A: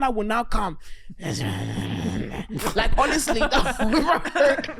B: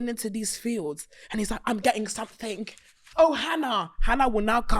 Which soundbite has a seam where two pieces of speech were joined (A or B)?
B